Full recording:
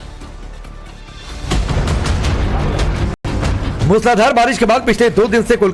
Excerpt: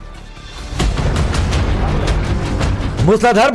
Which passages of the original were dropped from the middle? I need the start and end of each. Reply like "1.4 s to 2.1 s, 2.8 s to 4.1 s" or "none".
3.1 s to 3.2 s